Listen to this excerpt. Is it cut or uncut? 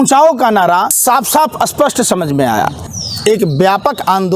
cut